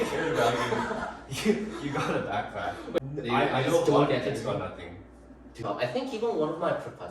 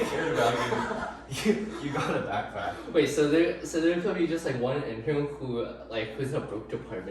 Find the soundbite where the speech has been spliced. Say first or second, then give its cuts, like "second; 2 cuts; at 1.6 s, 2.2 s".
first; 2 cuts; at 3.0 s, 5.6 s